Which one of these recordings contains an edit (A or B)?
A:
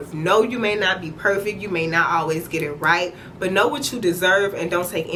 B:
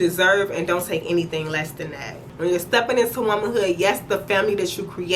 B